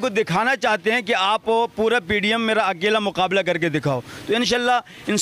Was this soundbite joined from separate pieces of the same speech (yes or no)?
no